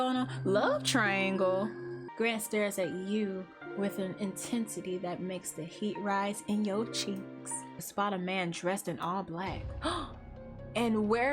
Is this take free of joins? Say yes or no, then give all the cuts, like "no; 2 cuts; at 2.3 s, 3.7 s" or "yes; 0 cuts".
no; 2 cuts; at 2.0 s, 7.9 s